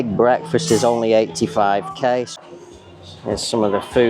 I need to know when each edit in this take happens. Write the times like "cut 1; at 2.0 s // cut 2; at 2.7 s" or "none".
cut 1; at 2.3 s